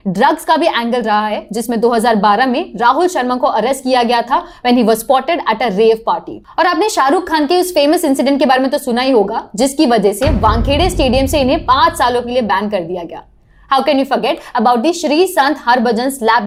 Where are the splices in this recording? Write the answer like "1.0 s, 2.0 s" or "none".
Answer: none